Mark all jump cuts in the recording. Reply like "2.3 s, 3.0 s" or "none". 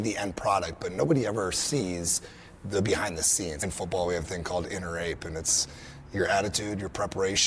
3.6 s